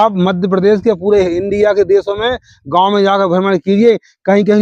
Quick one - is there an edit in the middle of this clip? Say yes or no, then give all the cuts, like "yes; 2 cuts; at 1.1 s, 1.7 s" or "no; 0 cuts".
no; 0 cuts